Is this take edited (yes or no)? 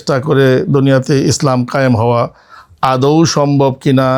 no